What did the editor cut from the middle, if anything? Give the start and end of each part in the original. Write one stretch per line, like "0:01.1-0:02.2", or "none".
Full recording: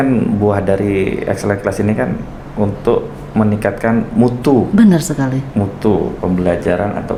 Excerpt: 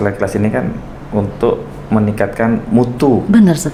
none